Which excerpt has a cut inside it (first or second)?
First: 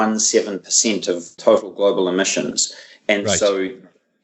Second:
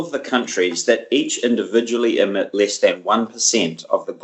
first